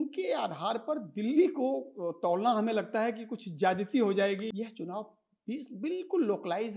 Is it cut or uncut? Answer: cut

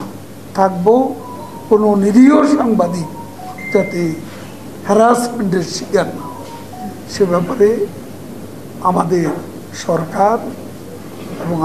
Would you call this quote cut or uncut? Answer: uncut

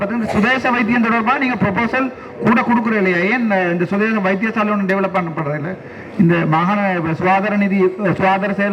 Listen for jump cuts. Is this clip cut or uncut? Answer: uncut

